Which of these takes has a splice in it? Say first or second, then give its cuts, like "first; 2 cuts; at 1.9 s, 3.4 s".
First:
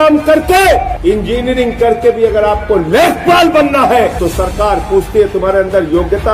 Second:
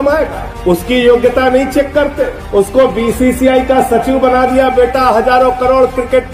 first; 2 cuts; at 0.9 s, 4.2 s